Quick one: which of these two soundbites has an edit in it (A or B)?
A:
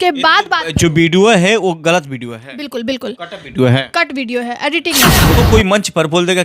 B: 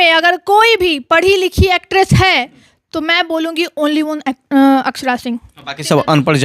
A